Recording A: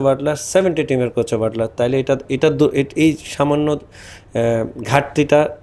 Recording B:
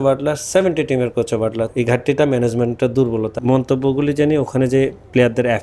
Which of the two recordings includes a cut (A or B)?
B